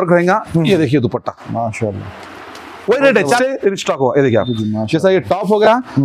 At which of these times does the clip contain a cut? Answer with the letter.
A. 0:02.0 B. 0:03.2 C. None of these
B